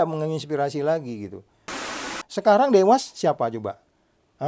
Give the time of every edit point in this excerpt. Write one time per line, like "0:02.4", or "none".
0:01.9